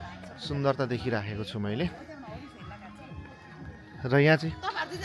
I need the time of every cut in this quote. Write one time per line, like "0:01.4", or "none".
none